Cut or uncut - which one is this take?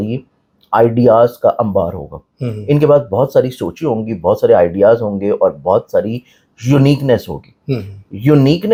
uncut